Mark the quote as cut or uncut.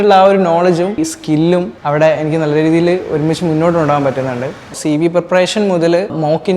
cut